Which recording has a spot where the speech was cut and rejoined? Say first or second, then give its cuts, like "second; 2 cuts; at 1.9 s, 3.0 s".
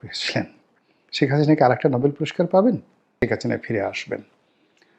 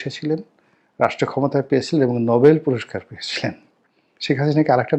first; 1 cut; at 3.2 s